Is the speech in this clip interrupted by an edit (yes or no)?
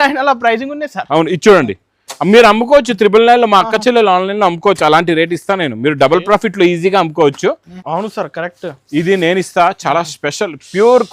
yes